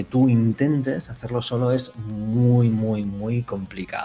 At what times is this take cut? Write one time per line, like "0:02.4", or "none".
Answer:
none